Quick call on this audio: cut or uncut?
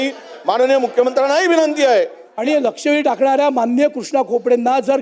cut